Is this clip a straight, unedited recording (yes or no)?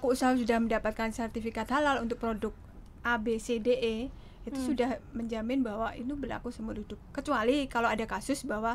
yes